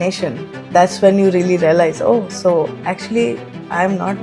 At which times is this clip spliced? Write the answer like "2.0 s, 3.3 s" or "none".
none